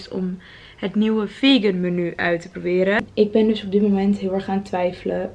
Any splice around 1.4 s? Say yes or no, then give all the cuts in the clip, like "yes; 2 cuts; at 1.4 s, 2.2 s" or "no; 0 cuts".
no; 1 cut; at 3.1 s